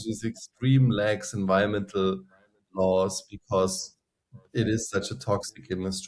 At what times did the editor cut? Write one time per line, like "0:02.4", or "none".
none